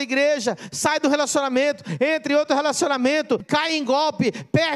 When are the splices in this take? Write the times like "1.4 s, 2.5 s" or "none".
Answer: 3.4 s